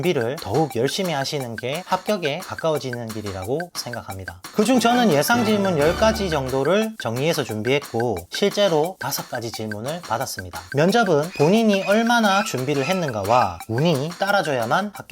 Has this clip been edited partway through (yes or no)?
yes